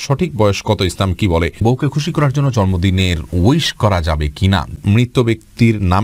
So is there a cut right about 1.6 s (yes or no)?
yes